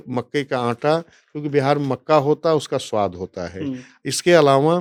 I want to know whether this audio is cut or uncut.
uncut